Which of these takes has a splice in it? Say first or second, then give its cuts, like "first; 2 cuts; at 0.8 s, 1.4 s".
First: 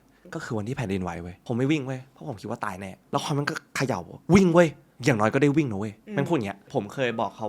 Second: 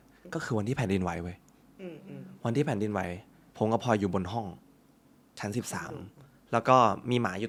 first; 4 cuts; at 1.3 s, 3.0 s, 4.9 s, 6.6 s